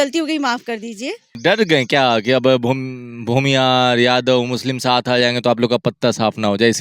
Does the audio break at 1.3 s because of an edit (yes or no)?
yes